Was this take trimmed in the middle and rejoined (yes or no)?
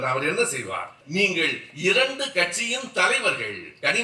yes